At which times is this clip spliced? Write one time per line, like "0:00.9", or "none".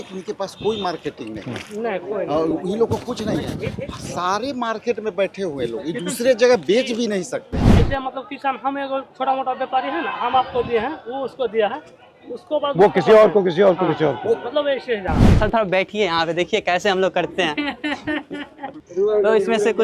0:07.7
0:15.2